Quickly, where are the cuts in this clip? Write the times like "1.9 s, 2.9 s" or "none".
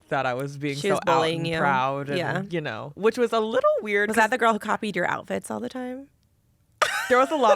2.8 s